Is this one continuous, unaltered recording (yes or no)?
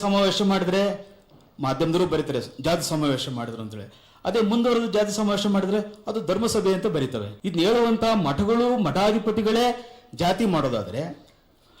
no